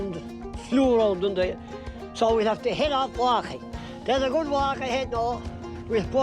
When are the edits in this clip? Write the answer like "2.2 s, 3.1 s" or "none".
none